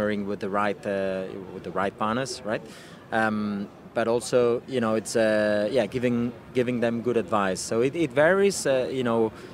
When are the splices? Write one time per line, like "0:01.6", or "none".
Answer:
none